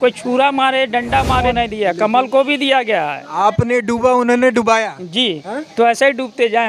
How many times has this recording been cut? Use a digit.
1